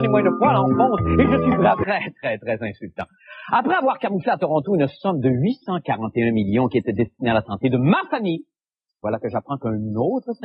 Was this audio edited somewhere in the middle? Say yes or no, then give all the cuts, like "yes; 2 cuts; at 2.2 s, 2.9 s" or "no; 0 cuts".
no; 0 cuts